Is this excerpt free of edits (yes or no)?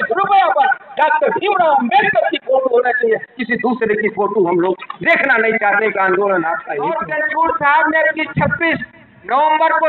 no